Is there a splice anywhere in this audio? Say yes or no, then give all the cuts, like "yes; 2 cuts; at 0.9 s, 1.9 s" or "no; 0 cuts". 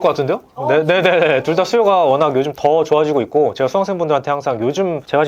no; 0 cuts